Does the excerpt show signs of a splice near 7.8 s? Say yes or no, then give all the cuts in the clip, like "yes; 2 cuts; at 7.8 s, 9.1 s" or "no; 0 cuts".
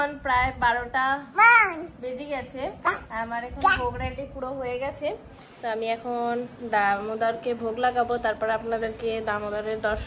no; 0 cuts